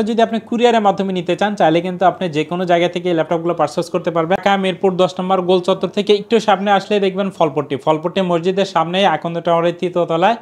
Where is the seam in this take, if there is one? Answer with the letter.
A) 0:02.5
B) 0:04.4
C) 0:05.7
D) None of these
B